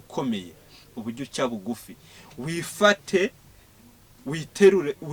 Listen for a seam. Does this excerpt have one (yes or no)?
no